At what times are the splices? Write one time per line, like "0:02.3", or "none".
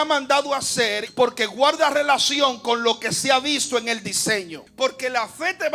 0:01.0
0:04.6

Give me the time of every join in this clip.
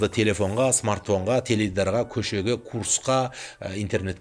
none

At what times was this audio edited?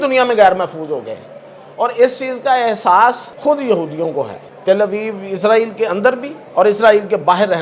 0:03.3
0:04.5
0:06.3

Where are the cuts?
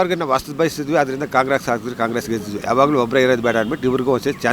0:02.5

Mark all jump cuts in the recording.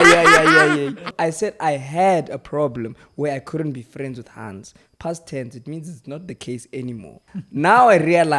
0:01.1

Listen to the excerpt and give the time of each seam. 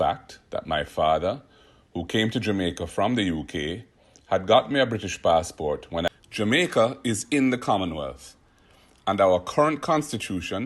0:06.1

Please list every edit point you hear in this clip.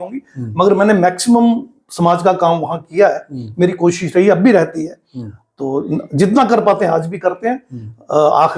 none

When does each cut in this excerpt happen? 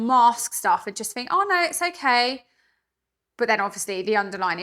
none

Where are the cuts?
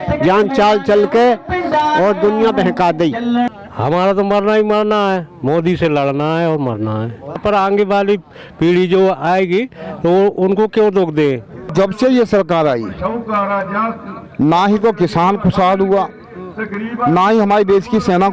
0:03.5
0:07.4
0:11.7

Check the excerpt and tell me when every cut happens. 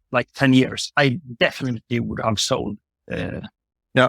none

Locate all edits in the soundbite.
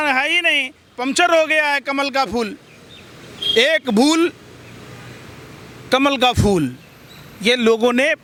none

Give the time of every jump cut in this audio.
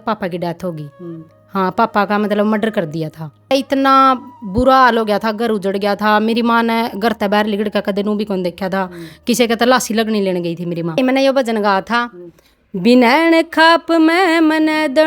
0:03.5
0:11.0

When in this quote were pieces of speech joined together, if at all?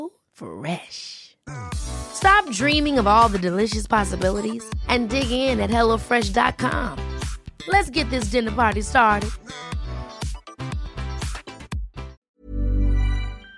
0:12.2

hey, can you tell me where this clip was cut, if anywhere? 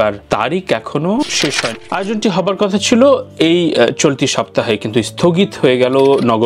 0:01.7

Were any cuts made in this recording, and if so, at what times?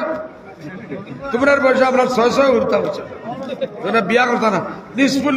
none

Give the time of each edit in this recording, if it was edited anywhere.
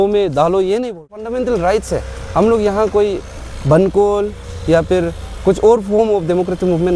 0:01.2

